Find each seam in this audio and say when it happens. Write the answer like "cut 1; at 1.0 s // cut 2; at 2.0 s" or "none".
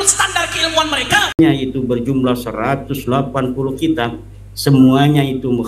cut 1; at 1.4 s